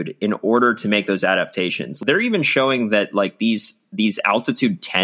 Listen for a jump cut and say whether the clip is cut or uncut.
cut